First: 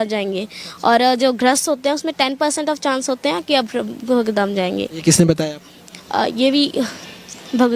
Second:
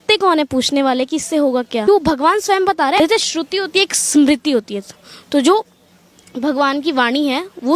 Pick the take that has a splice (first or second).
second